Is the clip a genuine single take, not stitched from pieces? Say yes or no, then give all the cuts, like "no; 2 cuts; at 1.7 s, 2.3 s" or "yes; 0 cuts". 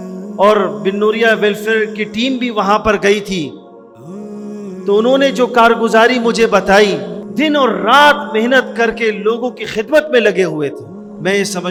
yes; 0 cuts